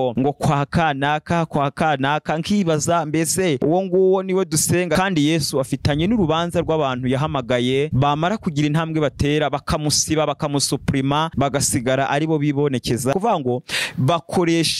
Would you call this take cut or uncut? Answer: cut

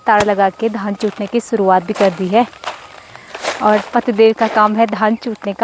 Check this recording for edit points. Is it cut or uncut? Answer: uncut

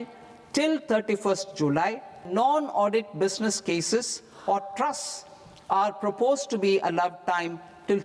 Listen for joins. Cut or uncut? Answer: cut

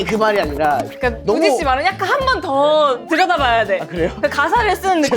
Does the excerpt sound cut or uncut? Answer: cut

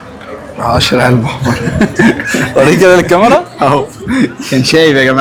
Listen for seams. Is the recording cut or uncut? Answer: uncut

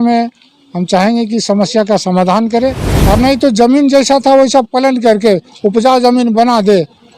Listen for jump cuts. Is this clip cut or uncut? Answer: cut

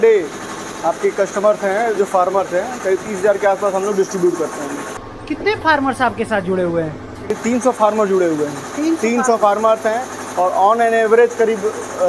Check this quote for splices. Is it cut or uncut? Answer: uncut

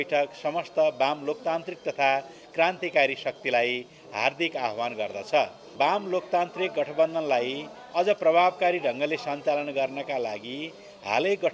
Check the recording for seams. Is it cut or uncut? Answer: cut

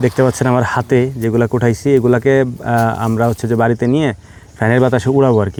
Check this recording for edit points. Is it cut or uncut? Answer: uncut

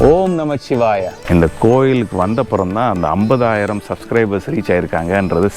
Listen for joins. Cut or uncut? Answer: cut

